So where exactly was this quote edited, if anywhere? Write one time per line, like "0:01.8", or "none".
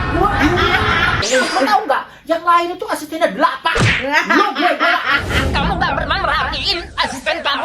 0:01.2